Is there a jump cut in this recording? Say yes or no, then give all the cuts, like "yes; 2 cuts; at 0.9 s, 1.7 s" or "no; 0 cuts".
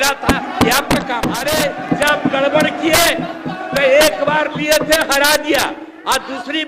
yes; 1 cut; at 1.4 s